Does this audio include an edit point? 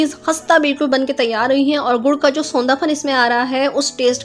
no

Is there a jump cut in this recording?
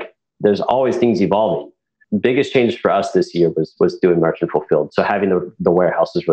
yes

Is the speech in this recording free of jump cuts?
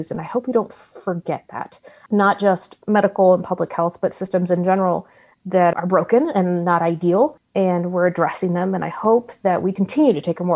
no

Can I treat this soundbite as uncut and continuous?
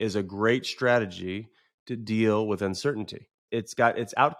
no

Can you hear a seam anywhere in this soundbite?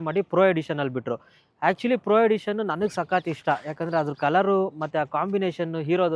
no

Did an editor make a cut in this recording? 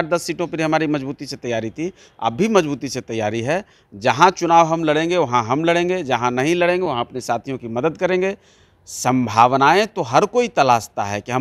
no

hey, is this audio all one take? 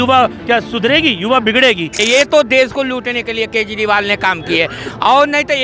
no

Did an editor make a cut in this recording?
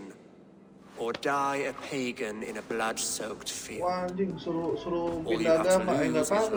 no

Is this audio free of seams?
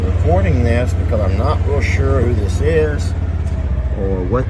yes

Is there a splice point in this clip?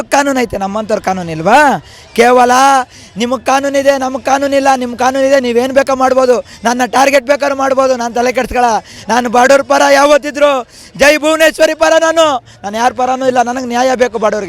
no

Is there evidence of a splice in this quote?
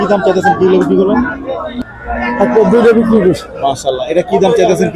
yes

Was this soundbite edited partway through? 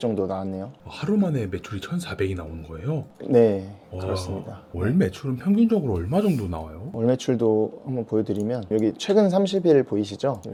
no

